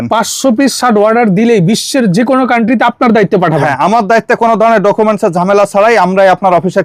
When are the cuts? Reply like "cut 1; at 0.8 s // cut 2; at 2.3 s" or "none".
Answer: none